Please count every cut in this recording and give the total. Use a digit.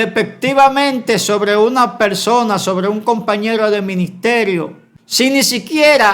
1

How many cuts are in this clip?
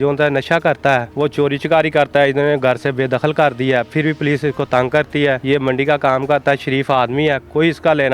2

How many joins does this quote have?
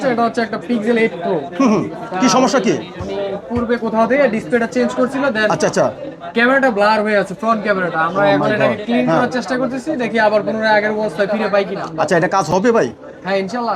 0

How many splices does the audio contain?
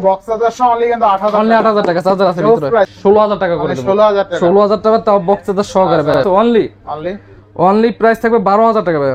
2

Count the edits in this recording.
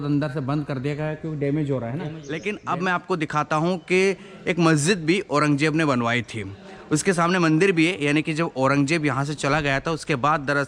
1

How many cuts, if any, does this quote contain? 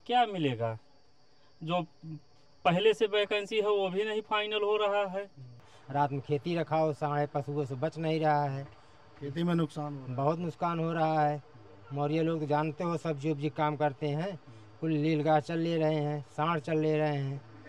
1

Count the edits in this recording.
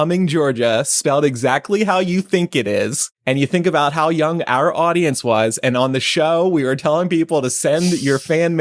1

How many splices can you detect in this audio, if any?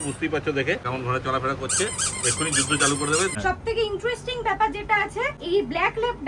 3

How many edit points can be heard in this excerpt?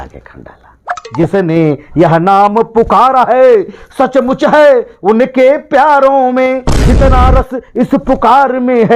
1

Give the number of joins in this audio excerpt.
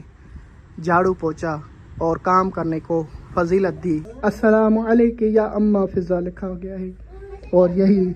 1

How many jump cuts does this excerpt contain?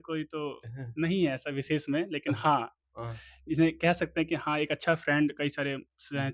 0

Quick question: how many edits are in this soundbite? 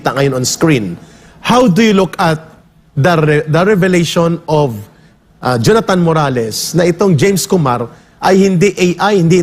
0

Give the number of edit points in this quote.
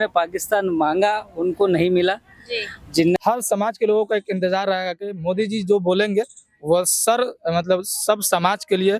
1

